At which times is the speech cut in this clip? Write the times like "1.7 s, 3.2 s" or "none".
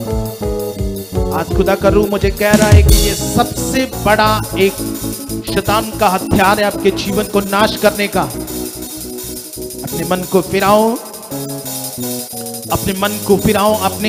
none